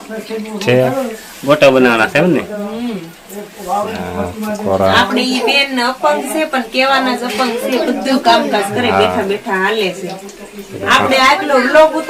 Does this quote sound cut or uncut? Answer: uncut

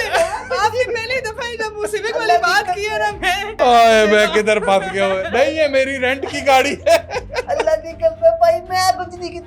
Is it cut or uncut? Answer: cut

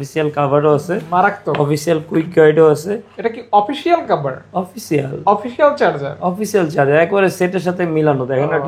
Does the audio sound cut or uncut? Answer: uncut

